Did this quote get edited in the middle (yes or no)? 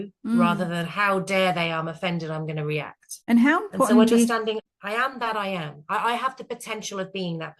yes